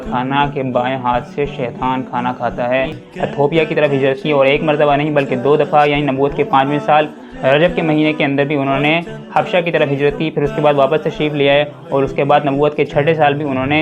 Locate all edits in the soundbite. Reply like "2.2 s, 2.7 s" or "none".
3.0 s